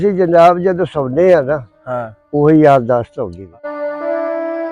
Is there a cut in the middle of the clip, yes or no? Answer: yes